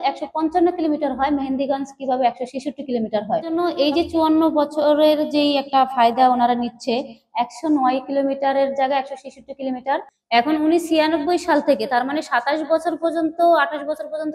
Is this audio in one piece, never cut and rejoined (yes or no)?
no